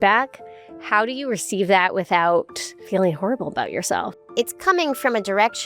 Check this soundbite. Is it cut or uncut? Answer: cut